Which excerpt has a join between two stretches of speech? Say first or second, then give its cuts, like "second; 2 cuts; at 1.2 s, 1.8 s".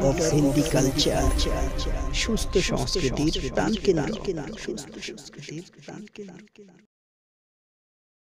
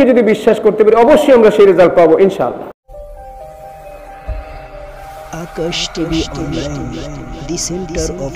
second; 1 cut; at 2.7 s